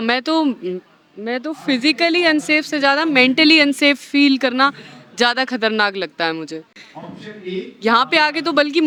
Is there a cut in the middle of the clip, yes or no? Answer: no